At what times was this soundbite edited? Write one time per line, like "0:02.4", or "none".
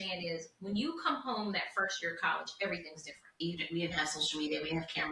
0:03.3